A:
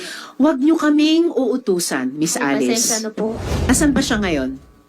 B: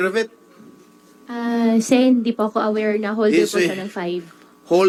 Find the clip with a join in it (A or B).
A